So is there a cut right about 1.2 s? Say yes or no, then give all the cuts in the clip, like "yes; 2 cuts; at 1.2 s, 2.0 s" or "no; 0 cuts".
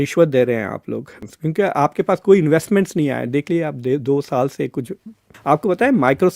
yes; 2 cuts; at 1.2 s, 5.3 s